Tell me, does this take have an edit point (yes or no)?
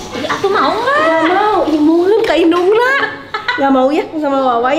no